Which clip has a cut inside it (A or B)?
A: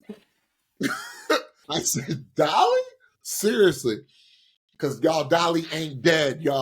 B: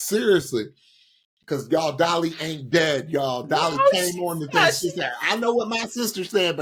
A